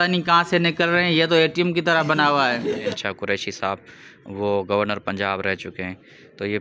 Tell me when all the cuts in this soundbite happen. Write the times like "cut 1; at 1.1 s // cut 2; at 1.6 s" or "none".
cut 1; at 3.0 s